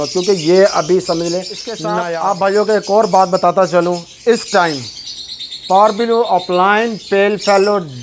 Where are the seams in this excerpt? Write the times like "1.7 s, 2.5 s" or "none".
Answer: 1.9 s